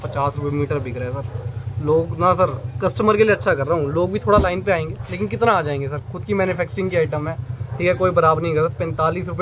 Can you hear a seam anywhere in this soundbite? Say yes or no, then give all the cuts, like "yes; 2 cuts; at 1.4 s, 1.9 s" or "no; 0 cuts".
no; 0 cuts